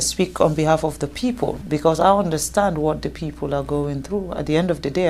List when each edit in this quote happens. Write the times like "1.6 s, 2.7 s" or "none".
1.6 s

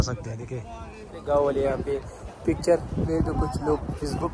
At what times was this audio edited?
1.2 s

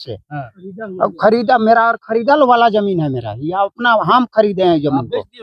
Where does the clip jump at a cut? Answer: none

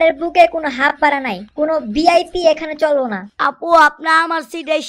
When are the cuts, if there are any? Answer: 3.3 s

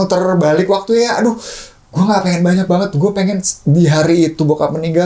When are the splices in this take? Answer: none

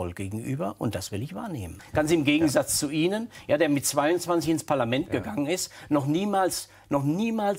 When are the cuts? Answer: 1.8 s

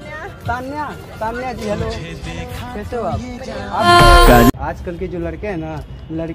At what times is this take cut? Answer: 3.9 s

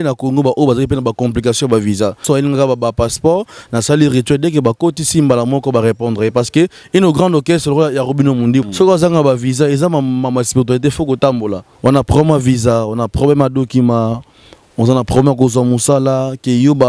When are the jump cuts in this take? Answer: 2.2 s, 8.7 s, 11.7 s

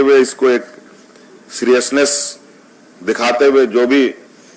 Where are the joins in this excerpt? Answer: none

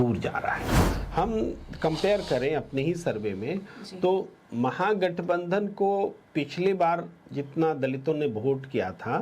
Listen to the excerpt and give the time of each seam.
0.9 s

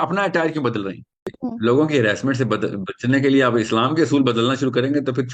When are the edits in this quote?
1.2 s

